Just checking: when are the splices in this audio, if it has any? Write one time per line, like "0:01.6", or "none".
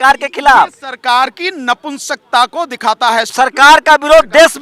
0:03.3